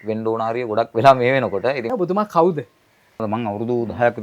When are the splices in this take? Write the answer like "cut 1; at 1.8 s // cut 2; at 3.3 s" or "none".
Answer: cut 1; at 1.9 s // cut 2; at 3.2 s